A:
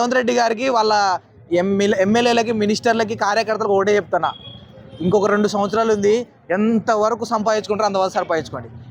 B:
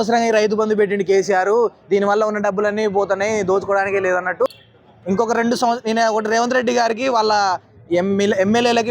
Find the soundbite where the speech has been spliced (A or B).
B